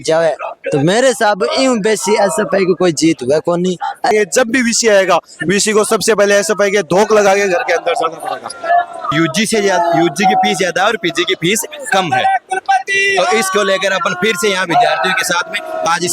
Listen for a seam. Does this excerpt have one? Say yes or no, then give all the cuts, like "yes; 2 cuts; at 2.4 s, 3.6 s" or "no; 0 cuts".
yes; 2 cuts; at 4.1 s, 9.1 s